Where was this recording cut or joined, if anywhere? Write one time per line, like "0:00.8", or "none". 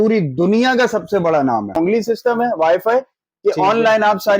0:01.9